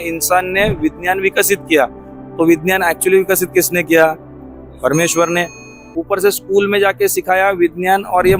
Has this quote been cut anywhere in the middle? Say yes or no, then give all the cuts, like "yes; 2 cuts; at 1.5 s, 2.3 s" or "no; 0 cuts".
yes; 1 cut; at 5.9 s